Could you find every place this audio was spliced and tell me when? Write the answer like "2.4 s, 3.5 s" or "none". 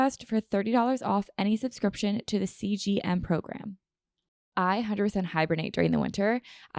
4.5 s

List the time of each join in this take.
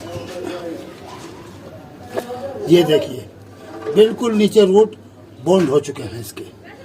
2.1 s

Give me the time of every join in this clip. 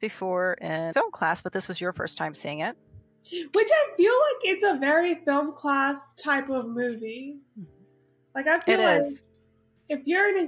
0.9 s

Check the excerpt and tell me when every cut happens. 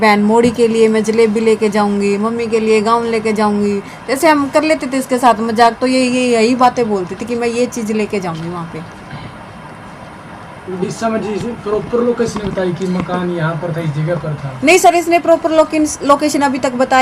none

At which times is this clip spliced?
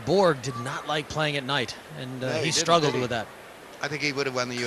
none

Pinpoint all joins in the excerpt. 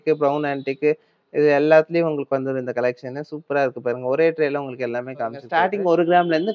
5.4 s

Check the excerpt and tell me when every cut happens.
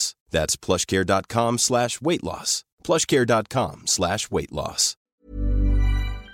5.0 s

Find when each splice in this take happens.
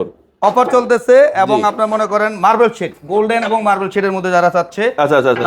none

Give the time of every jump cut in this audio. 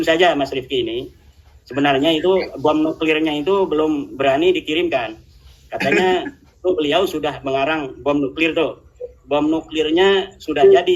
none

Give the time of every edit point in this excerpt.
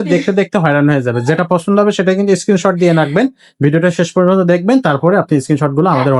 none

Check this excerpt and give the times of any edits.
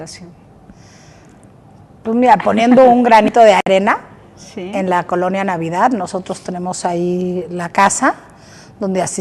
8.2 s

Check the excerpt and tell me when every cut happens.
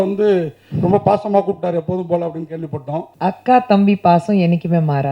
3.1 s

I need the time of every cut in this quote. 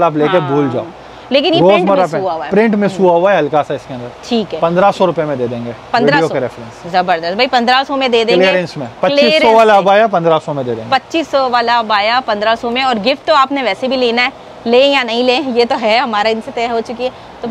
none

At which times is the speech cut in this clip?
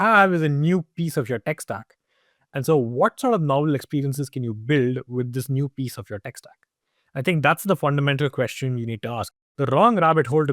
9.3 s

